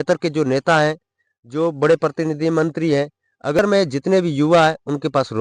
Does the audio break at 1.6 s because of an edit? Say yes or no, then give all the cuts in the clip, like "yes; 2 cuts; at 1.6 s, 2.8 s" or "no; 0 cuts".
no; 1 cut; at 3.6 s